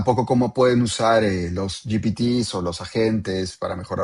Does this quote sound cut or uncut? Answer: uncut